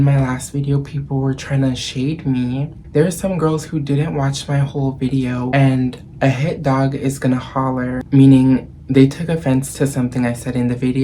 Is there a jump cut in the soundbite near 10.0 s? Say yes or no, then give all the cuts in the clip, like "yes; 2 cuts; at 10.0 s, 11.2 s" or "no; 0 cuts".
no; 2 cuts; at 5.5 s, 8.0 s